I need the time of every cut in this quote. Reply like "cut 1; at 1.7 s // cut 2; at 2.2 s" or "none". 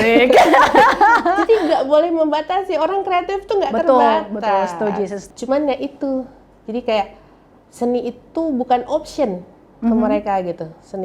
cut 1; at 5.2 s

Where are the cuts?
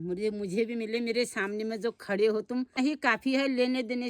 cut 1; at 2.8 s

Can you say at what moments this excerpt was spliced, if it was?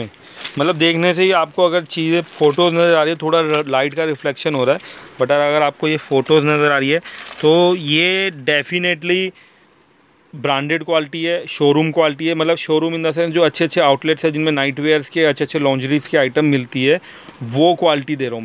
none

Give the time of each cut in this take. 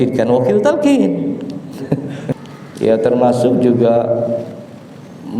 cut 1; at 2.3 s

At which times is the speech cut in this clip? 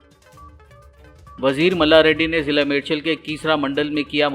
cut 1; at 1.1 s

